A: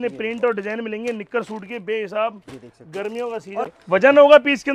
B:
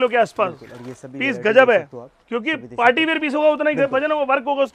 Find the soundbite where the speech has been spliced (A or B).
A